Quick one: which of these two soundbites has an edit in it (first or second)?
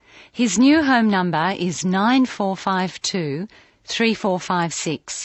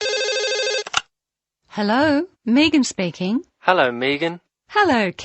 second